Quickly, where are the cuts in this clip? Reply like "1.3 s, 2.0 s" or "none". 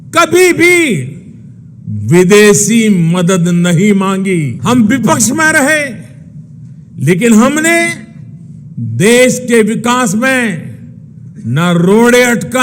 4.5 s